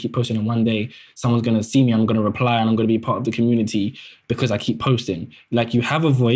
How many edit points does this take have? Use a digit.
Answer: 1